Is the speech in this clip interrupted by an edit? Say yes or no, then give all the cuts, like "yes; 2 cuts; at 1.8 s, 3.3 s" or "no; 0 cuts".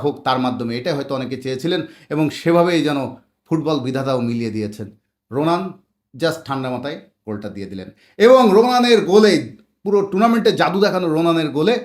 no; 0 cuts